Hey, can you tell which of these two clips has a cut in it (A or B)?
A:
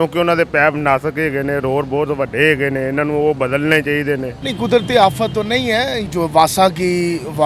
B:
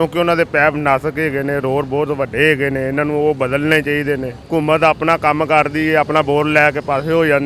A